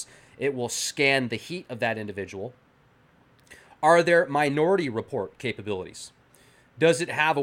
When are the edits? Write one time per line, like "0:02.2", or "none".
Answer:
0:04.5